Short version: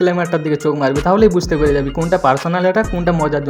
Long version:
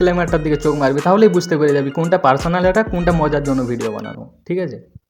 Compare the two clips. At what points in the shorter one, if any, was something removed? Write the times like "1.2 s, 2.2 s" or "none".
none